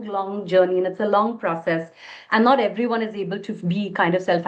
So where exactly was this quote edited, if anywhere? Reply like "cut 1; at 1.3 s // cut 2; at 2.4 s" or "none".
none